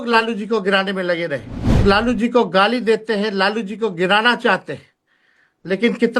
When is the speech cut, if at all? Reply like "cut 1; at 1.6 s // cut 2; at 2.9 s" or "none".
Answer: cut 1; at 1.8 s

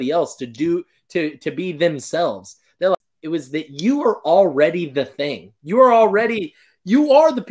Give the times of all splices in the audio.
cut 1; at 3.0 s

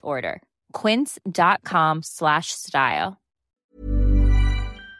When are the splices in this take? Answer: cut 1; at 3.7 s

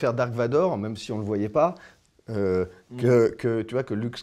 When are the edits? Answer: none

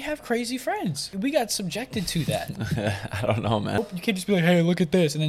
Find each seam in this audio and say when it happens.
cut 1; at 1.1 s // cut 2; at 3.8 s

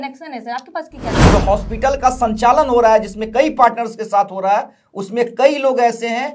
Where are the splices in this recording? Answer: cut 1; at 1.1 s

